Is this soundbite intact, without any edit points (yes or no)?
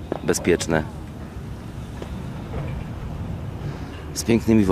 no